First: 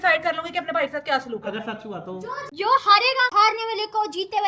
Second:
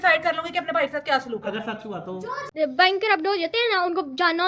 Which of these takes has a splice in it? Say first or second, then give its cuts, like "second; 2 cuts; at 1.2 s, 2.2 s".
second; 1 cut; at 2.5 s